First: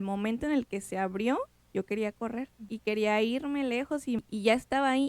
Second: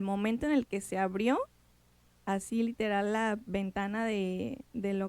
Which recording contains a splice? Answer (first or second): first